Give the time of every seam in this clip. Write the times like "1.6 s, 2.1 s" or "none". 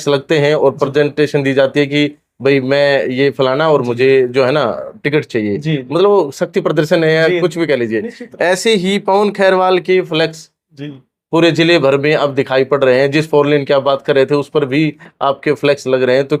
none